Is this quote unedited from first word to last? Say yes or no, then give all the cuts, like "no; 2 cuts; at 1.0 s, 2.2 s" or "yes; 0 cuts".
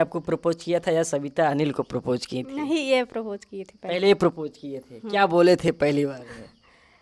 yes; 0 cuts